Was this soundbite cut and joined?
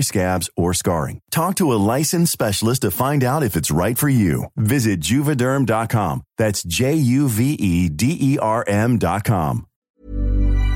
yes; 1 cut; at 9.7 s

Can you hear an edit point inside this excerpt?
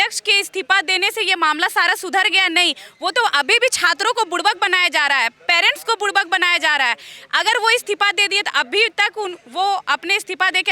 no; 0 cuts

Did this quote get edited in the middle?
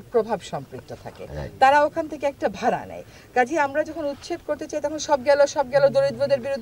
no; 0 cuts

